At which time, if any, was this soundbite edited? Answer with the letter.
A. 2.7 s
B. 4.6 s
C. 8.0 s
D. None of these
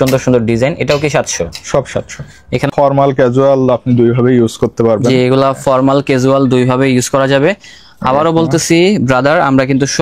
A